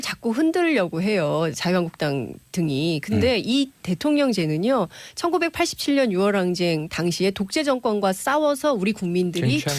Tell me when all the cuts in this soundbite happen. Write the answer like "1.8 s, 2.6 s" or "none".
7.4 s